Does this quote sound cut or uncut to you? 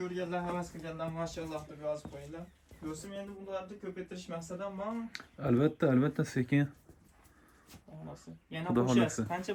uncut